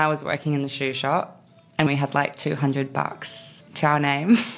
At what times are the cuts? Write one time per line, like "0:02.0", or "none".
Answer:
0:01.9
0:03.7

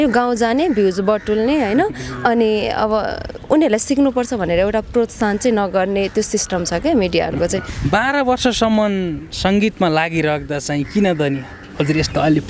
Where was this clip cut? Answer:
0:07.7

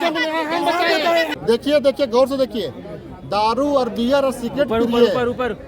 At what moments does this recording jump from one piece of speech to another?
0:01.8

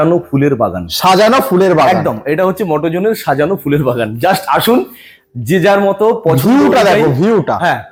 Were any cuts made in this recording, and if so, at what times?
none

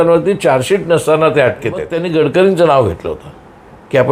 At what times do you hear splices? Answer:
0:02.0

